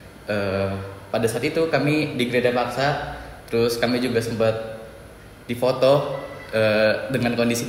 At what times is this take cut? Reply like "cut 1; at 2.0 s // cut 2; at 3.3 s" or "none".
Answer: none